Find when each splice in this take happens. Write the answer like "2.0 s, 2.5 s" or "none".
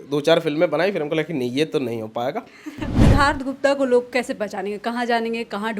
2.9 s